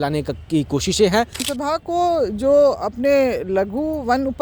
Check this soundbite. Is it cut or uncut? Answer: cut